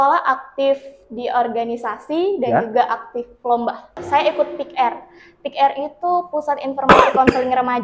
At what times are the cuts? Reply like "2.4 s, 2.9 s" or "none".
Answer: 4.0 s